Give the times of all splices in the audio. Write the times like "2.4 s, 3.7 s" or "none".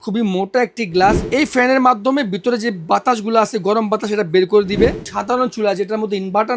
1.3 s, 5.0 s